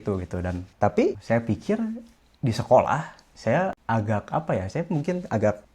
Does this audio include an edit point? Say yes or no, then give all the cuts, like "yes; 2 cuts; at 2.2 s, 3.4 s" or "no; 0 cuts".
yes; 1 cut; at 3.8 s